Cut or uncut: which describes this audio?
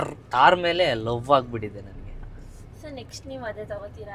uncut